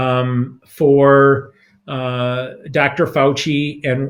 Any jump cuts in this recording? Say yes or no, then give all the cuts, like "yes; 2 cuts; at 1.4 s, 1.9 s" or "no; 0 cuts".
no; 0 cuts